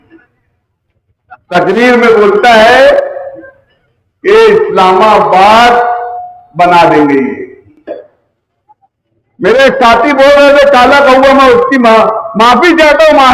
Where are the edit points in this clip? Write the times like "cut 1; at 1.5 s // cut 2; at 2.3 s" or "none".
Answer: cut 1; at 7.9 s